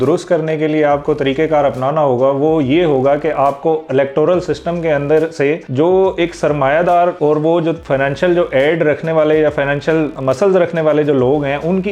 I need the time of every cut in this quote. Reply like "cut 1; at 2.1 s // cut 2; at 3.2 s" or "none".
cut 1; at 7.4 s // cut 2; at 10.1 s

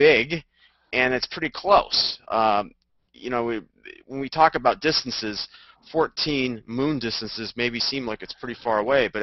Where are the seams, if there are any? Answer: cut 1; at 6.6 s

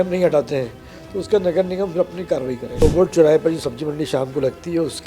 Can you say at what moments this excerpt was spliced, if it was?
cut 1; at 2.8 s

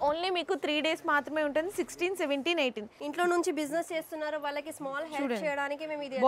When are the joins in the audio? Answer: cut 1; at 2.9 s

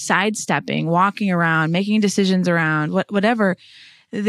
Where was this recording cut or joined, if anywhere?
none

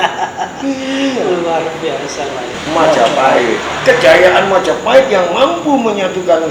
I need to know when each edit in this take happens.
cut 1; at 2.5 s

